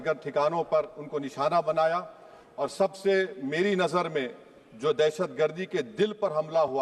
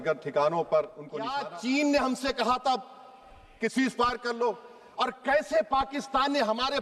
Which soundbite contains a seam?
second; 1 cut; at 1.3 s

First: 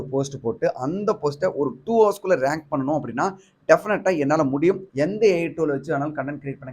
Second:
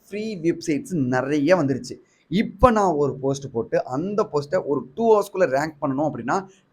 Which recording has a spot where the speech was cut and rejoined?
first; 1 cut; at 4.8 s

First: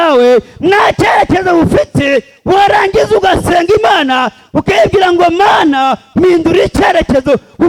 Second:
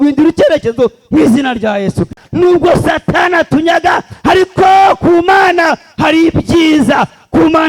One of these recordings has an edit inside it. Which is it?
second; 1 cut; at 2.2 s

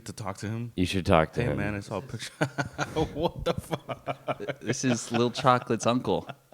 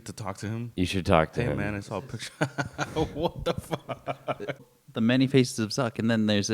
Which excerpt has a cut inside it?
second; 1 cut; at 4.7 s

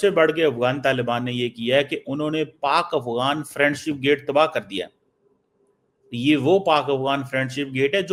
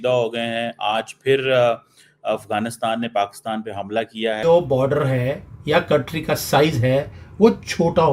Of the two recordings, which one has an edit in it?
second; 1 cut; at 4.4 s

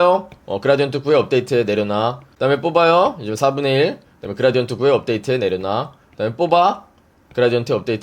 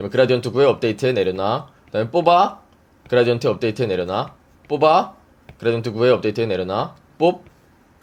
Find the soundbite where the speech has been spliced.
first; 1 cut; at 2.2 s

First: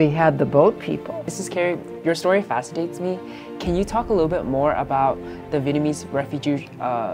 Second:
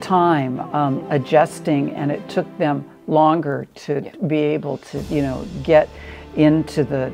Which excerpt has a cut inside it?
first; 1 cut; at 1.1 s

